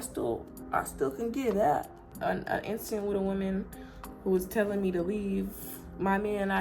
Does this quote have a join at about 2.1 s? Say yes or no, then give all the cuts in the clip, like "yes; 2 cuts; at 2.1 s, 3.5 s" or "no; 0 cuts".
yes; 1 cut; at 2.1 s